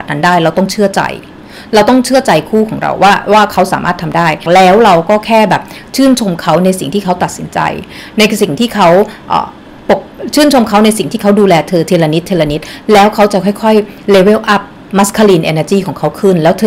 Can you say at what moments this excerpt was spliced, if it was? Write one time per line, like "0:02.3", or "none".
0:04.4